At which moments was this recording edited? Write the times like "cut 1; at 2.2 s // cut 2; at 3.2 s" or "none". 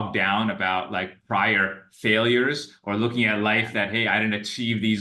none